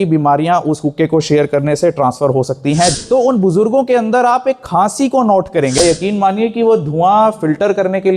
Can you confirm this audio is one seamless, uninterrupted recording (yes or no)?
no